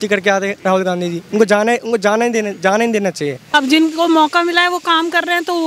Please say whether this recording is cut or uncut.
cut